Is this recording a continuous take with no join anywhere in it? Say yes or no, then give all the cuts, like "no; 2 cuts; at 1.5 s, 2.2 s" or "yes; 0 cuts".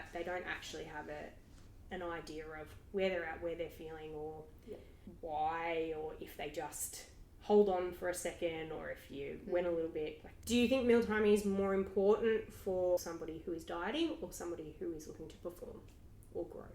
no; 2 cuts; at 10.3 s, 13.1 s